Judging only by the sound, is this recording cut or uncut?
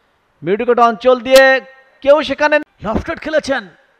cut